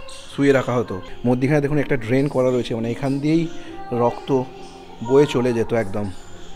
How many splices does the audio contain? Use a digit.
1